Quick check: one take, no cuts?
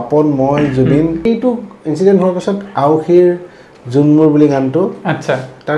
no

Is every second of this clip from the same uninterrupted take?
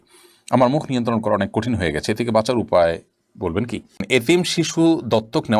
no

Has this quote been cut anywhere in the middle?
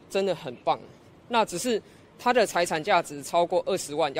no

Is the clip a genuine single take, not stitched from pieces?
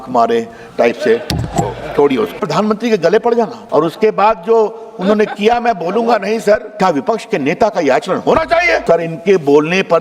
no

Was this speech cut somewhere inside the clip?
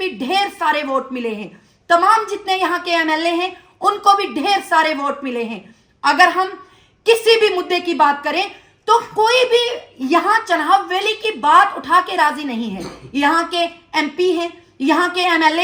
no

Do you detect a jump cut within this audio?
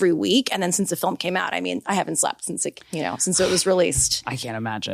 no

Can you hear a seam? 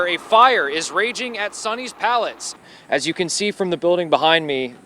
yes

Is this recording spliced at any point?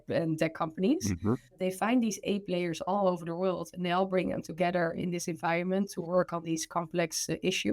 yes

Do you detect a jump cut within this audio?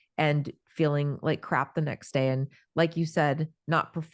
no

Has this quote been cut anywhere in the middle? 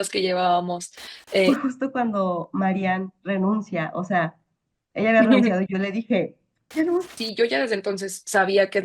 yes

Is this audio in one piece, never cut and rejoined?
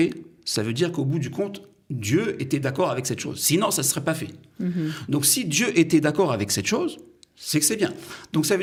yes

